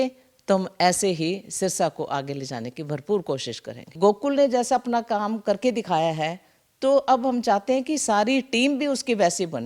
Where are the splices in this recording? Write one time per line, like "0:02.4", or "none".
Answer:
0:03.9